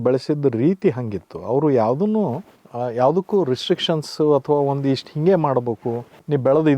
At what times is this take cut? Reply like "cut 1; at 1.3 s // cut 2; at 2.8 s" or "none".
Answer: none